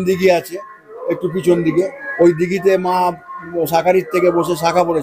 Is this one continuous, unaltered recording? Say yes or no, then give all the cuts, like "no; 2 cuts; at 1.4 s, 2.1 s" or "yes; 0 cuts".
no; 1 cut; at 2.0 s